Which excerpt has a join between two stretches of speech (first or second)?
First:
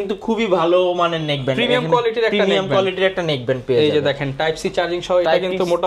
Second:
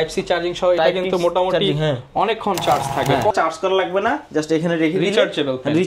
second